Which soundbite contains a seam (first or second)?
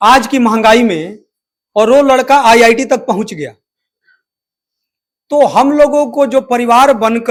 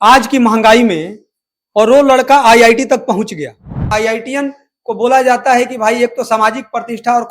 second